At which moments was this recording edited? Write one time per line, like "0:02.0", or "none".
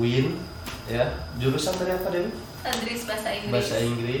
none